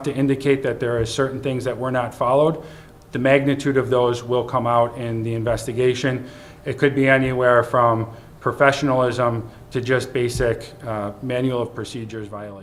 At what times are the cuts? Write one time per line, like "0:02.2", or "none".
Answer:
none